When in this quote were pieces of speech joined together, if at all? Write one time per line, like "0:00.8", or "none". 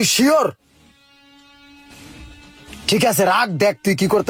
none